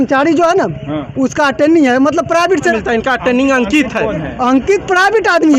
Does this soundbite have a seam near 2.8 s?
yes; 1 cut; at 2.8 s

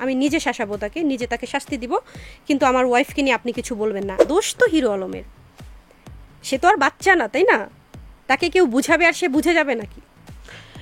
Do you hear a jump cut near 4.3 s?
yes; 1 cut; at 4.3 s

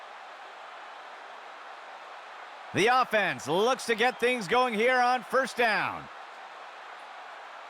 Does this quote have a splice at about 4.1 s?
no; 3 cuts; at 1.0 s, 2.7 s, 6.0 s

